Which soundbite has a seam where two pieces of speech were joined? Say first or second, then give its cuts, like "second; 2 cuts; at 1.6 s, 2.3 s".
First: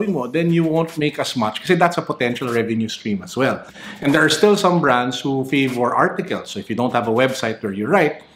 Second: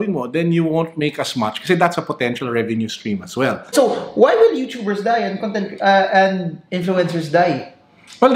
second; 1 cut; at 3.6 s